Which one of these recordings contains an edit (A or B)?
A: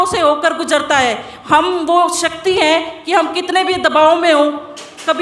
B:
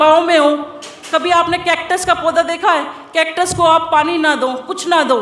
A